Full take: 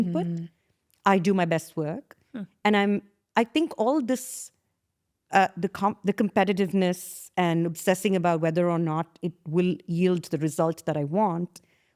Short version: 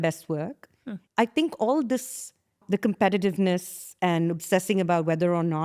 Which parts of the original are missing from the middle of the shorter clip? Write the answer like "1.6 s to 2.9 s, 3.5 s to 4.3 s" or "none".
2.5 s to 3.2 s, 4.8 s to 6.0 s